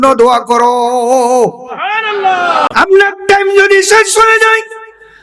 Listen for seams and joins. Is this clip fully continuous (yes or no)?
no